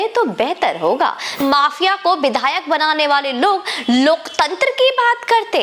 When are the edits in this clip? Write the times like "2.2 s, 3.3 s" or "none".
1.4 s